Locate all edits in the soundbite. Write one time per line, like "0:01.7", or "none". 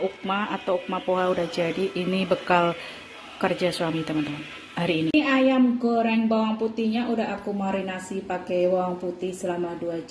0:05.1